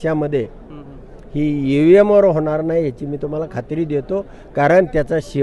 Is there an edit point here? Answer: no; 0 cuts

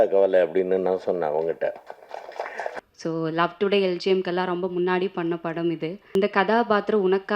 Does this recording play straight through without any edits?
no; 2 cuts; at 2.7 s, 6.2 s

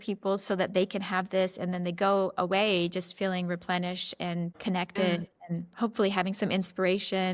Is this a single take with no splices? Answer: yes; 0 cuts

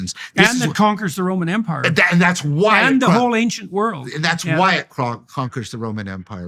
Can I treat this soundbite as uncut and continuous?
yes; 0 cuts

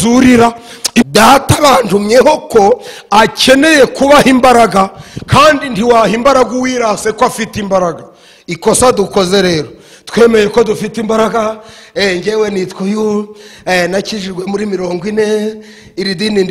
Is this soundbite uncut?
no; 1 cut; at 1.0 s

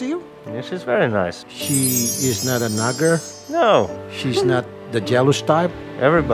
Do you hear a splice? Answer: yes; 1 cut; at 1.5 s

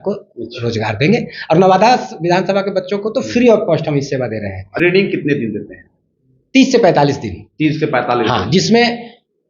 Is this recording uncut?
no; 1 cut; at 4.7 s

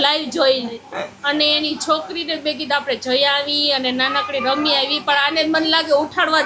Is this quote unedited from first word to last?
yes; 0 cuts

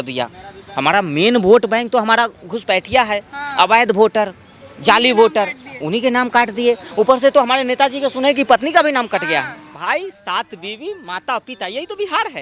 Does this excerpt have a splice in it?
yes; 1 cut; at 9.8 s

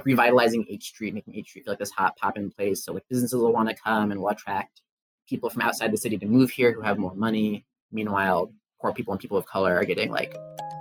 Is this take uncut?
yes; 0 cuts

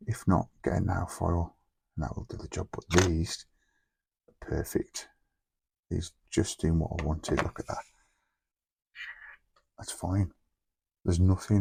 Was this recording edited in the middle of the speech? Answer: no; 0 cuts

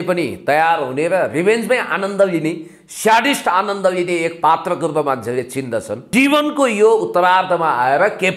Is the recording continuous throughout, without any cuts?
no; 1 cut; at 6.0 s

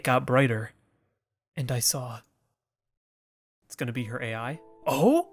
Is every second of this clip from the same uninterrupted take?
yes; 0 cuts

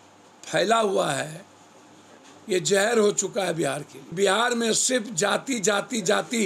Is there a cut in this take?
yes; 1 cut; at 4.0 s

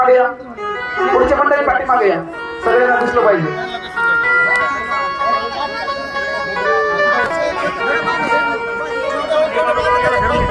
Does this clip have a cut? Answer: no; 0 cuts

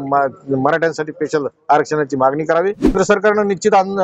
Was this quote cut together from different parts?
yes; 1 cut; at 2.9 s

